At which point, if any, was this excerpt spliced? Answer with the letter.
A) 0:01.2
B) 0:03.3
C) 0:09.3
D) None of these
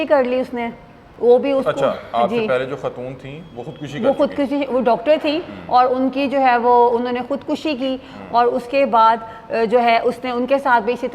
D